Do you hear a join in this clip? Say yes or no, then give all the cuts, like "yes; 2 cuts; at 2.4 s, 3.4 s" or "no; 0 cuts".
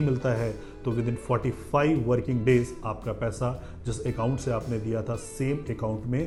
no; 0 cuts